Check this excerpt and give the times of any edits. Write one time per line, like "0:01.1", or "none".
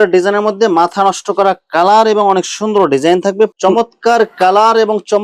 0:03.5